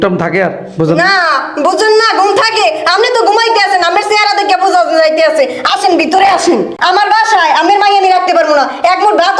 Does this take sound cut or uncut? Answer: cut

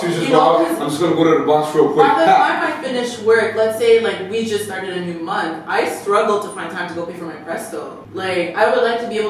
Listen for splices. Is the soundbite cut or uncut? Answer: cut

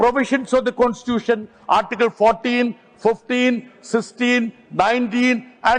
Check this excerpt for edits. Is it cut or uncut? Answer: uncut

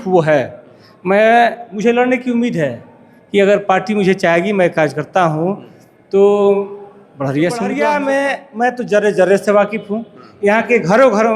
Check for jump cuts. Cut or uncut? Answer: cut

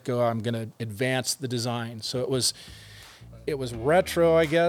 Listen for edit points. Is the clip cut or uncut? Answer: uncut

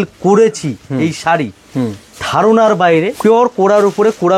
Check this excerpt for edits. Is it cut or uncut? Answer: cut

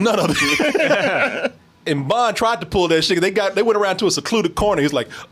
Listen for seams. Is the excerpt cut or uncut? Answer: cut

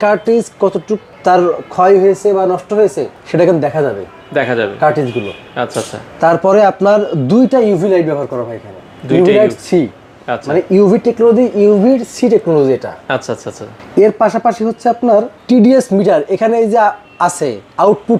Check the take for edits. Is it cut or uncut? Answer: uncut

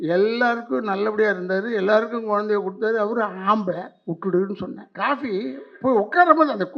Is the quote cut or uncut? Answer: cut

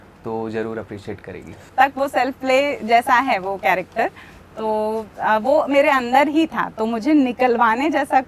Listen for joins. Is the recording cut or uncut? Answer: cut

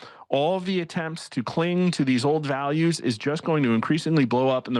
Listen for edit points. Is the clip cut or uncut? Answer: uncut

